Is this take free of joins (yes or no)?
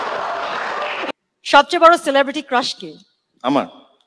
no